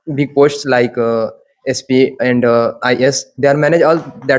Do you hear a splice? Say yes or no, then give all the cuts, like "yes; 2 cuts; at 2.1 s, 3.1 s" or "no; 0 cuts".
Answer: no; 0 cuts